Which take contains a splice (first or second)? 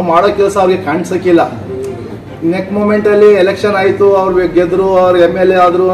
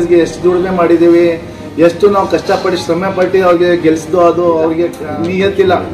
second